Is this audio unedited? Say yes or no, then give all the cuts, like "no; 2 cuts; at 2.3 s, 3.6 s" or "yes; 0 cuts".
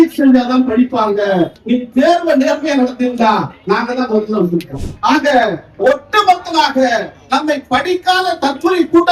no; 2 cuts; at 1.6 s, 4.8 s